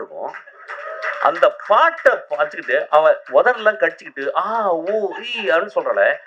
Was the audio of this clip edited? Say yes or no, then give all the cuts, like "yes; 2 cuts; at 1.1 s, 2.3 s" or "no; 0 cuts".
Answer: no; 0 cuts